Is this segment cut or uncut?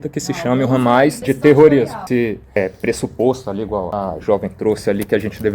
cut